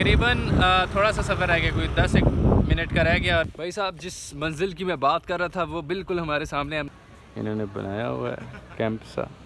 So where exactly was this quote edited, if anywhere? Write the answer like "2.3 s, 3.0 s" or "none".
3.5 s, 6.9 s